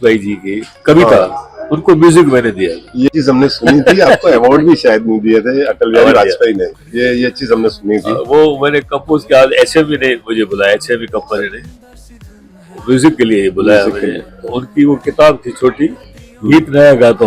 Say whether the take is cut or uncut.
cut